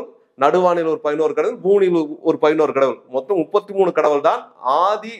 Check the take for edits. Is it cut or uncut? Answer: uncut